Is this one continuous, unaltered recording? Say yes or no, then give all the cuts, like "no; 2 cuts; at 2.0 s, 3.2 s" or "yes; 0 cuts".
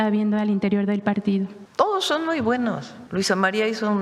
no; 2 cuts; at 1.6 s, 2.9 s